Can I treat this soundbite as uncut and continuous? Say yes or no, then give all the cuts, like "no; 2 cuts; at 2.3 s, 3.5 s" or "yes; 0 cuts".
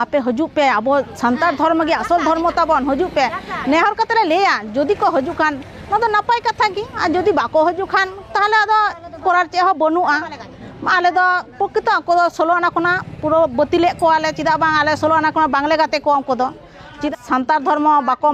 no; 1 cut; at 17.1 s